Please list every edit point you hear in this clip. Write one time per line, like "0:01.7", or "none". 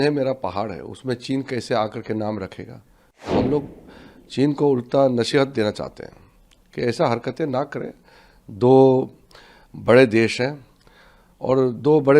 0:03.3